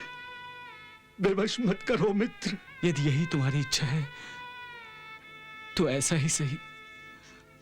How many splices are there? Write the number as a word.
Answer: one